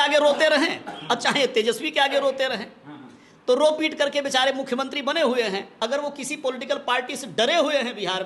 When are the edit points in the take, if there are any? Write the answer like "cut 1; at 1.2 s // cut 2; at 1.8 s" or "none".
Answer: cut 1; at 5.7 s